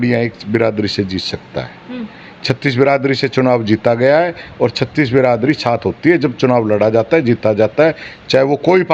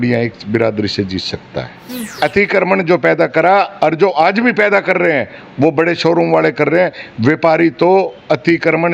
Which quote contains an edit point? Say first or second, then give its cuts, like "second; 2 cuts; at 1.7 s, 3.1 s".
second; 1 cut; at 2.2 s